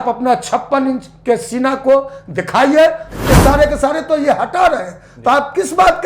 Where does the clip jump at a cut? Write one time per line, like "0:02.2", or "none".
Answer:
0:03.1